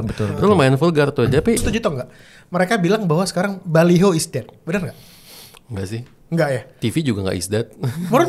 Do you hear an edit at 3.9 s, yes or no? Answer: no